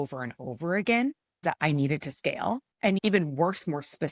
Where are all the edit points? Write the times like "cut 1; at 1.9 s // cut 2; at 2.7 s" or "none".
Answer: cut 1; at 1.4 s // cut 2; at 3.0 s